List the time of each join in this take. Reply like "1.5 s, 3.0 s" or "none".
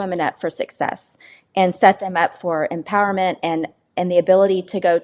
none